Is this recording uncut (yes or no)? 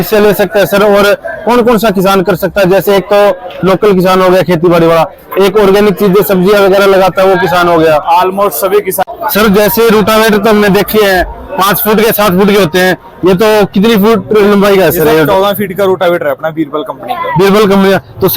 no